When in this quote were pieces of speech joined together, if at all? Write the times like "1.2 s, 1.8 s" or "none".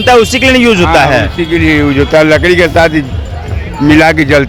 none